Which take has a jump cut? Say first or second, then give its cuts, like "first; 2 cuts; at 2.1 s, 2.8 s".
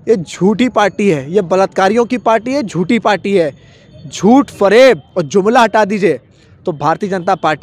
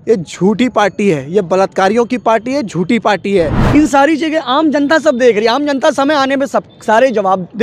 second; 1 cut; at 3.6 s